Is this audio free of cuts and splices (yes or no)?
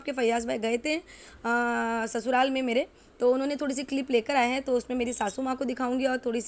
yes